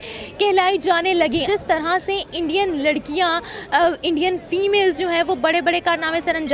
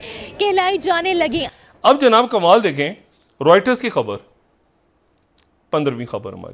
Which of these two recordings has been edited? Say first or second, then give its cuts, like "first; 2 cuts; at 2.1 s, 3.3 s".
second; 1 cut; at 1.5 s